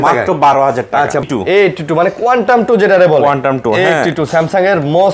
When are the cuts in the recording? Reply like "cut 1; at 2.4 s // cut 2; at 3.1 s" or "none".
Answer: cut 1; at 1.2 s